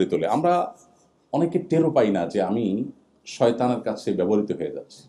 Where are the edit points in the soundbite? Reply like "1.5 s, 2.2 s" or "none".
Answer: none